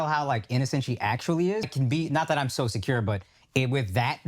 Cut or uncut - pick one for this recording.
cut